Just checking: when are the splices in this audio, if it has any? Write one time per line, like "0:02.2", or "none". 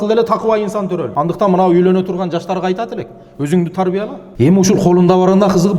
0:01.1
0:04.2